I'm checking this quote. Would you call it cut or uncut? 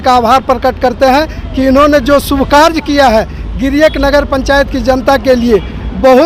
uncut